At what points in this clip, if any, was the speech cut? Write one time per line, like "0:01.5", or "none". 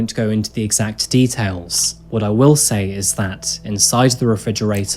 none